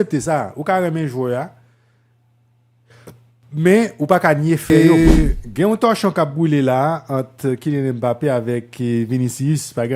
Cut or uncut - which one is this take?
cut